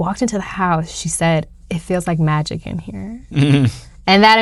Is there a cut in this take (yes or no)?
no